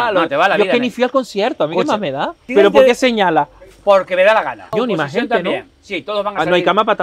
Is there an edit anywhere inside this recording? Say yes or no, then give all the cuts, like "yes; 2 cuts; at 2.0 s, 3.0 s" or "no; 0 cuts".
yes; 2 cuts; at 2.4 s, 4.7 s